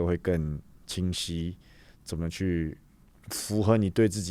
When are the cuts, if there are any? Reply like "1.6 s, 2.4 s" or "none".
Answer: none